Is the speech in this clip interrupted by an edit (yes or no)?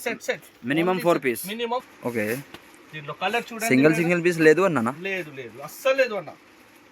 yes